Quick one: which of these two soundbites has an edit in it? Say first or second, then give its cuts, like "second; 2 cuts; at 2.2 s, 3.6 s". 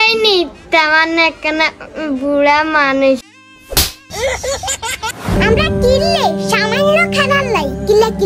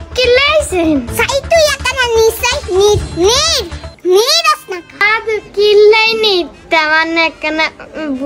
first; 1 cut; at 5.4 s